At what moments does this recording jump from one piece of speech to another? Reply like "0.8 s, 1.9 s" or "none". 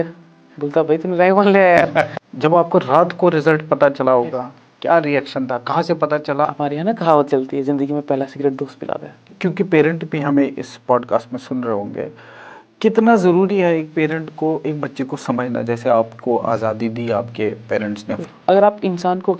2.1 s, 6.5 s, 9.3 s, 18.2 s

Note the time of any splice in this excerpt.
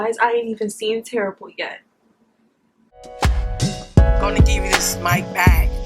3.1 s

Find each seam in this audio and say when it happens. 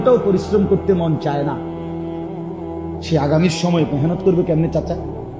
1.5 s, 2.7 s

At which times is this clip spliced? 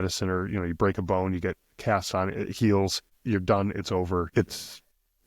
3.1 s, 4.3 s

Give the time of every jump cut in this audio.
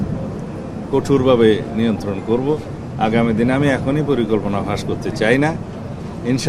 none

